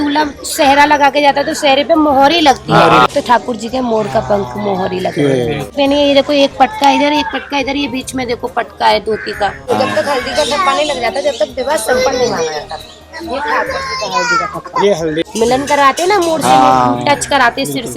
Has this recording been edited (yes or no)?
yes